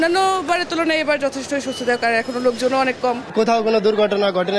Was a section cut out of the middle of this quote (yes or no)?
yes